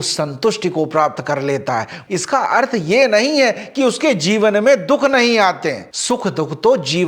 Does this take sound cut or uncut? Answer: cut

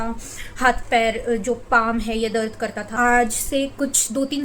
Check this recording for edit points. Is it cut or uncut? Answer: cut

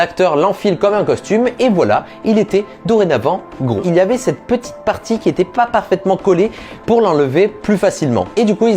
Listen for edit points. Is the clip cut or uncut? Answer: cut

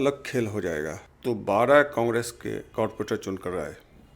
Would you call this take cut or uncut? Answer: cut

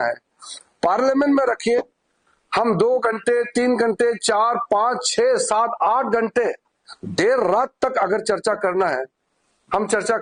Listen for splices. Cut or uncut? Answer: uncut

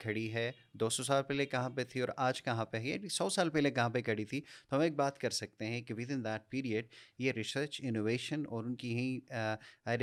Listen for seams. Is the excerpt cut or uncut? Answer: uncut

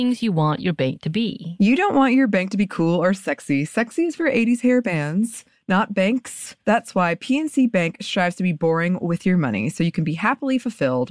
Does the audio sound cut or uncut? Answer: uncut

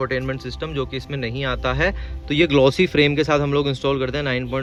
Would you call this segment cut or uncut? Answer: uncut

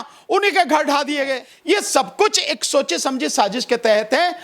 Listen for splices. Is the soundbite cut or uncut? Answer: cut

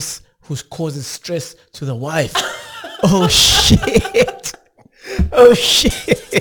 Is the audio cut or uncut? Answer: uncut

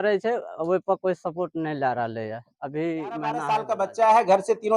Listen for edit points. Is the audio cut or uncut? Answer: cut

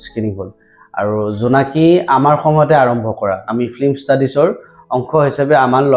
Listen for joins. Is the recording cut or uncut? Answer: uncut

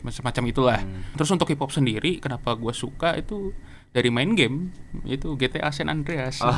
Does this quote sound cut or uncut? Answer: cut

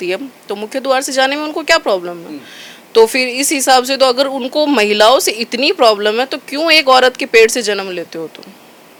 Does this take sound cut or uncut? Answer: uncut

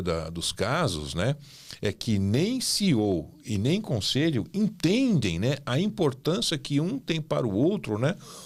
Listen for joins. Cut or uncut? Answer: uncut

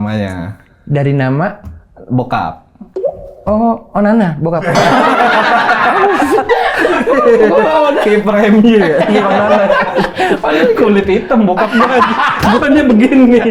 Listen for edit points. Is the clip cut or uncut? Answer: uncut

